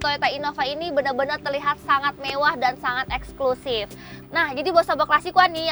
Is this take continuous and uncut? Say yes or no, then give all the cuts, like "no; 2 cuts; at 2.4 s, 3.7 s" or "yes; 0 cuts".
no; 1 cut; at 4.1 s